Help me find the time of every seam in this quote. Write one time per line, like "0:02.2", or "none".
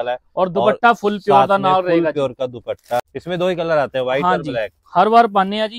0:03.1

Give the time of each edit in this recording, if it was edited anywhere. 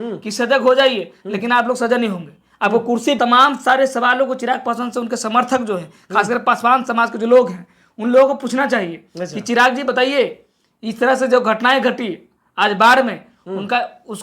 0:03.2

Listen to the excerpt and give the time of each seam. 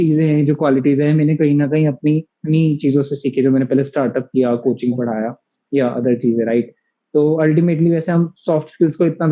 none

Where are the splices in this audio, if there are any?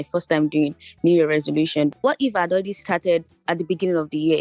0:02.0

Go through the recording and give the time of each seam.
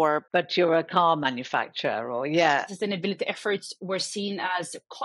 0:02.6

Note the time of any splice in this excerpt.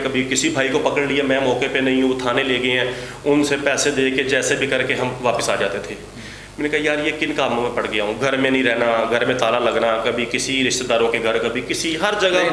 none

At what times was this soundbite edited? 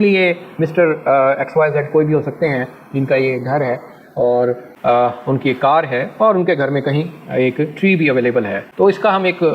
none

